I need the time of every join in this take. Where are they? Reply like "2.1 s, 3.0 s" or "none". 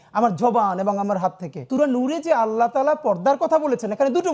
1.6 s

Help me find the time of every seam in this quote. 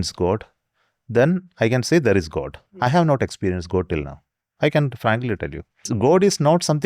5.9 s

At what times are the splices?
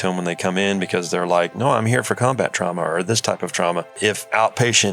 4.0 s

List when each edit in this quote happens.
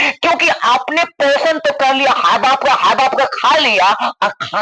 none

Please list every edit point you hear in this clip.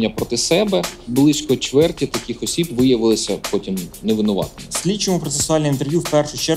1.0 s, 4.6 s

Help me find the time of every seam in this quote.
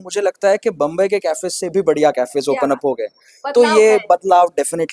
none

